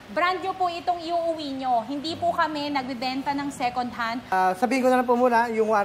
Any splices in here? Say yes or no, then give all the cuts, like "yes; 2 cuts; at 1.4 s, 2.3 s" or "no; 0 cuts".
yes; 1 cut; at 4.2 s